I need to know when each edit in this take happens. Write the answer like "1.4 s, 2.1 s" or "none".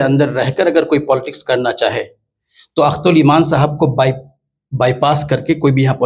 none